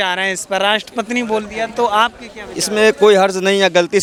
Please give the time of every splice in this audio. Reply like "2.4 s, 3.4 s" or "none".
none